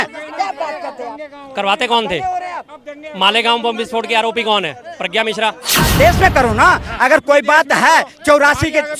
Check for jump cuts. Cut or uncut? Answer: cut